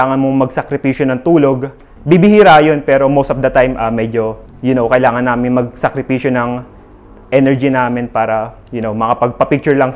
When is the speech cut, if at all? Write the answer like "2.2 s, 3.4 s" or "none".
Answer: 1.9 s, 4.4 s, 8.6 s